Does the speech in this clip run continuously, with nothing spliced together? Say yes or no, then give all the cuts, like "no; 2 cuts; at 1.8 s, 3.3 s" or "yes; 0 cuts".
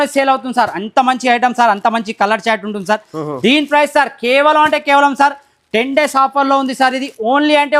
yes; 0 cuts